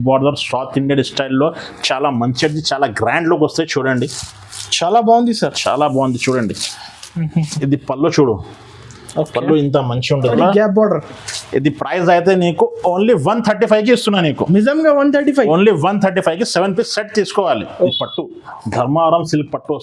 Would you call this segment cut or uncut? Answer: cut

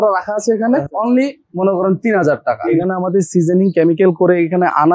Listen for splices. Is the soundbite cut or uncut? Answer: cut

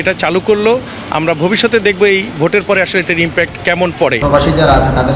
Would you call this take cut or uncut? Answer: cut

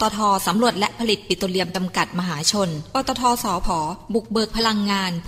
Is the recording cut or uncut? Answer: uncut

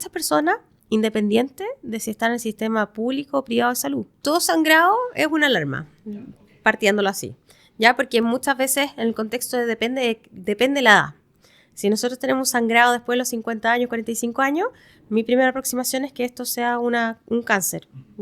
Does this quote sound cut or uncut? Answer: cut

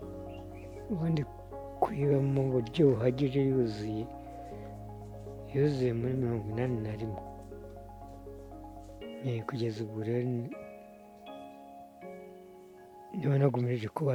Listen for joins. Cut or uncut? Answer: uncut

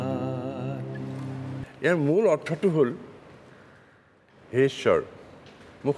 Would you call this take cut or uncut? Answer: cut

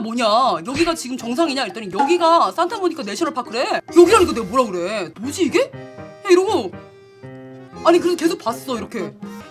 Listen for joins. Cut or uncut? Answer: cut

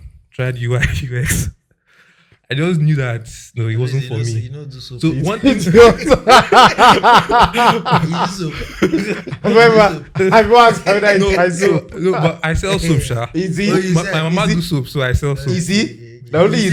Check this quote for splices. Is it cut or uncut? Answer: uncut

